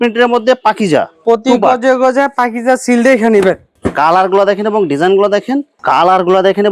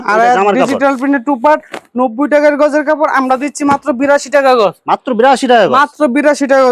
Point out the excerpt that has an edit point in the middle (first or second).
first